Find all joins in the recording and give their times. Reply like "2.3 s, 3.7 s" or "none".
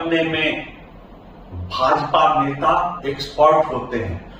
none